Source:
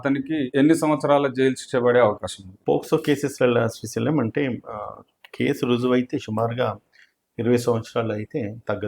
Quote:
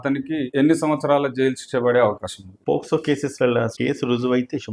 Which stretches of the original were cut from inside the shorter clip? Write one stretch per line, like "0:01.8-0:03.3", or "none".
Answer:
0:03.7-0:05.3